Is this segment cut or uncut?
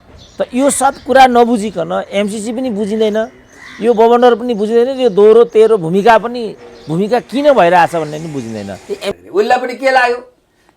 cut